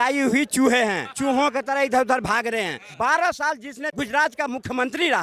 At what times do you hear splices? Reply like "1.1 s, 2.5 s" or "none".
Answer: 1.1 s, 2.8 s, 3.9 s